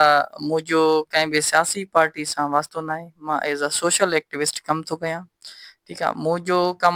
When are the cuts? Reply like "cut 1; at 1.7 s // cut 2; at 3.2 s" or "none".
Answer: none